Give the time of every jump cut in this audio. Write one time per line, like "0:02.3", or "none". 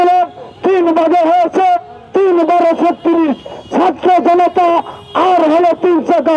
none